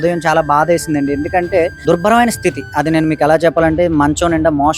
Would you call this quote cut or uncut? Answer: cut